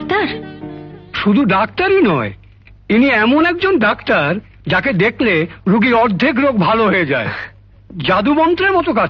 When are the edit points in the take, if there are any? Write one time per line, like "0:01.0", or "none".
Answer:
none